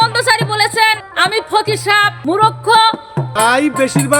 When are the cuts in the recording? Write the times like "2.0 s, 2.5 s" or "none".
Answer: 1.1 s, 2.2 s, 3.2 s